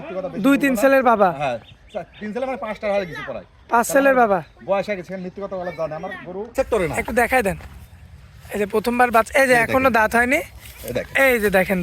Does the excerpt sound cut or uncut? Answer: cut